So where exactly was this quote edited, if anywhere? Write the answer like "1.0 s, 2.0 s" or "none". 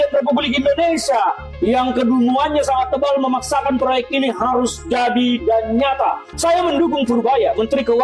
6.3 s